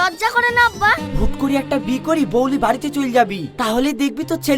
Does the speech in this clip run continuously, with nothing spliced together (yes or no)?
no